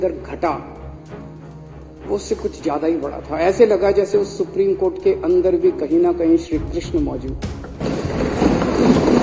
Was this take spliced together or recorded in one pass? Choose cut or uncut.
uncut